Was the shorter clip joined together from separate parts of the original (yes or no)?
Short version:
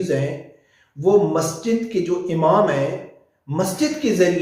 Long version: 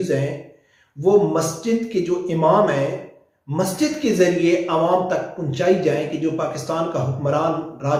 no